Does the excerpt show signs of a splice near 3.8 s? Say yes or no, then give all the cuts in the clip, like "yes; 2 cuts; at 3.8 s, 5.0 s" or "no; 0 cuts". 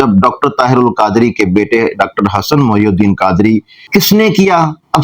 yes; 1 cut; at 3.8 s